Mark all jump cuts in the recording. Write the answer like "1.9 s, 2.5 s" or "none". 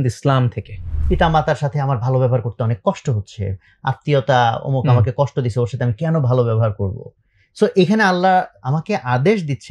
0.9 s